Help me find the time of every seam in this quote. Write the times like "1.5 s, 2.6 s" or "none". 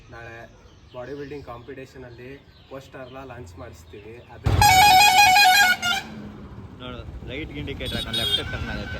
4.4 s